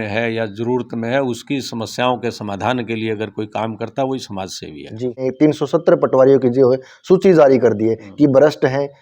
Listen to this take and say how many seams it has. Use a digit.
1